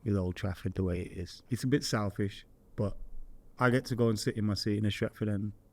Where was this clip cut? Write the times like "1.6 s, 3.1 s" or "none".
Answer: 1.4 s